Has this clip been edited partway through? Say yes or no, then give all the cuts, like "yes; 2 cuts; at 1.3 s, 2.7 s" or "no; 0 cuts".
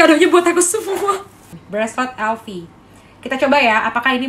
yes; 1 cut; at 1.3 s